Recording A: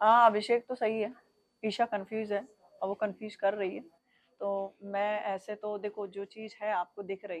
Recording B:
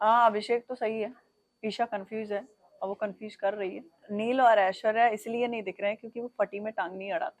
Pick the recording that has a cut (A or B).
B